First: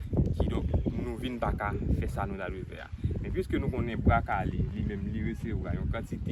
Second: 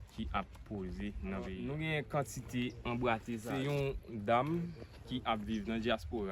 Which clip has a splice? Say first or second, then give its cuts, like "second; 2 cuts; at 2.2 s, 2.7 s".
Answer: second; 2 cuts; at 1.6 s, 3.5 s